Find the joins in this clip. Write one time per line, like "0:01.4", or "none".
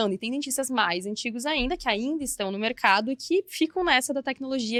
none